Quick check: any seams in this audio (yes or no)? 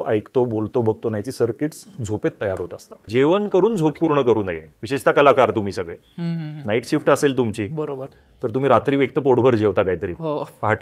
yes